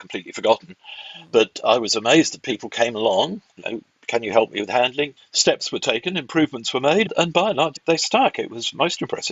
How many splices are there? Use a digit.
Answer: 2